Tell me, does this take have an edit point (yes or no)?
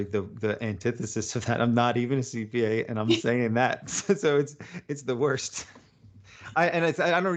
no